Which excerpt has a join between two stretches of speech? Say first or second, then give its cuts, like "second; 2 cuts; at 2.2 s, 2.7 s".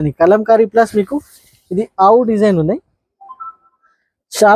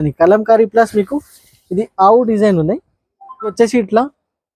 second; 1 cut; at 3.5 s